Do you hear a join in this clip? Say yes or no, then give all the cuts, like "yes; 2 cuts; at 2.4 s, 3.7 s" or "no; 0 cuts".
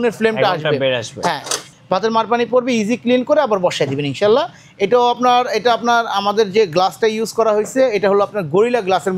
yes; 1 cut; at 1.5 s